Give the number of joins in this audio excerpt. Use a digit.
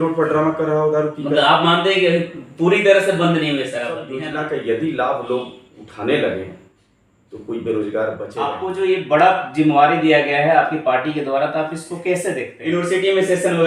3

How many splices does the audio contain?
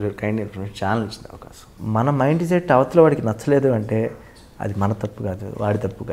1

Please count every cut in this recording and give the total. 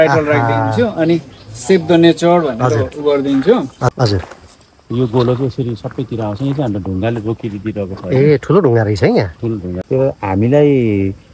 2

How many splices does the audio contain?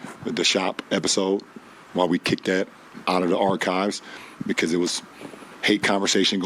1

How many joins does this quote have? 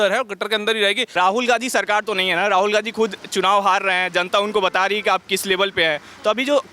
1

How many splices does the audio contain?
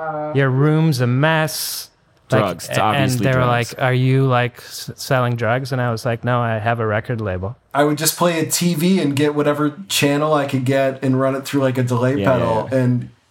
1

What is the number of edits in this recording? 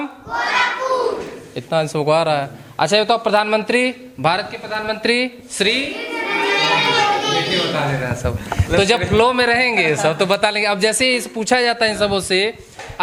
0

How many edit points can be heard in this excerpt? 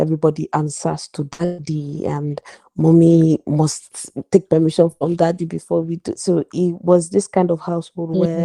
0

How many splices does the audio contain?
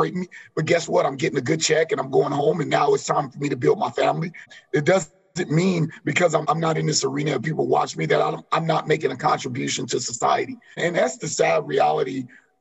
3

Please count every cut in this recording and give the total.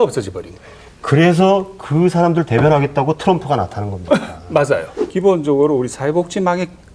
1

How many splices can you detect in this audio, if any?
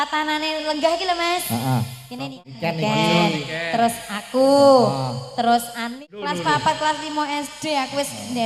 2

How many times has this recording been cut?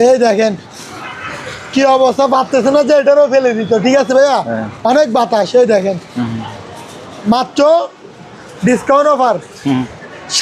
0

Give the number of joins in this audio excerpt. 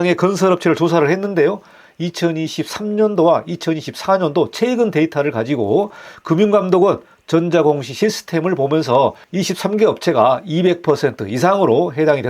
0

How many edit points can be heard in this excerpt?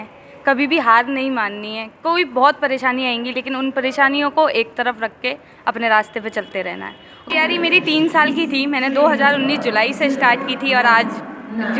1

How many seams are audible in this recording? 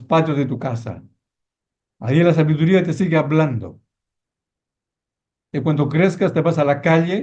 0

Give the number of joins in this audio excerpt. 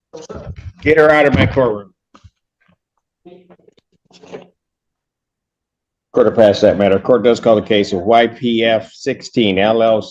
0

